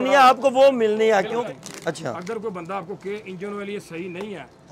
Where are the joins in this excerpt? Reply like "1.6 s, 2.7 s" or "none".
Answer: 1.4 s